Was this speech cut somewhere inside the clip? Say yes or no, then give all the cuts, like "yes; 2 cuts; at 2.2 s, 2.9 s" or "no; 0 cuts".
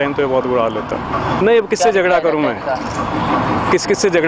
no; 0 cuts